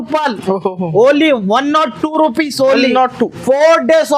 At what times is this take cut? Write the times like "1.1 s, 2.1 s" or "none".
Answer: none